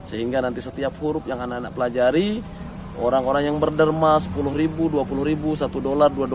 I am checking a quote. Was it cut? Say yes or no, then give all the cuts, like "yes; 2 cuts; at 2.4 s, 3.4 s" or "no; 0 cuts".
no; 0 cuts